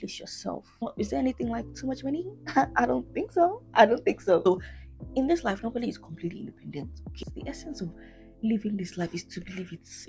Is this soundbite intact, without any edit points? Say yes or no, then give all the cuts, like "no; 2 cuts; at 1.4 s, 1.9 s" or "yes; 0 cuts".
no; 3 cuts; at 0.8 s, 4.4 s, 7.1 s